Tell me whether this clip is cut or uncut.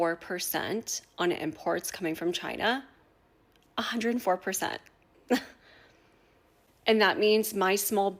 uncut